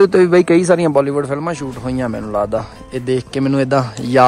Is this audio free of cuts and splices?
yes; 0 cuts

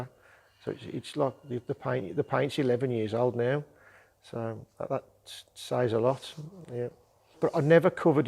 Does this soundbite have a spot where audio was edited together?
no; 0 cuts

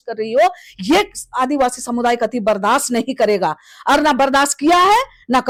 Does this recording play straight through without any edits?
yes; 0 cuts

